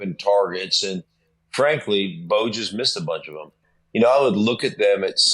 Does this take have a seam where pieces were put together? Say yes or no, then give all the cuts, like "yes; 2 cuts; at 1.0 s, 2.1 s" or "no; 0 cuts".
yes; 1 cut; at 3.6 s